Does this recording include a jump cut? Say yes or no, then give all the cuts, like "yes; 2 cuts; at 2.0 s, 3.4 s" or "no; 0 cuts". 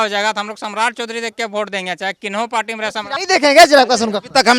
yes; 1 cut; at 3.1 s